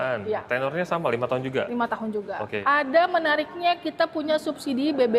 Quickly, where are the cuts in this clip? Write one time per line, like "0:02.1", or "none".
0:02.5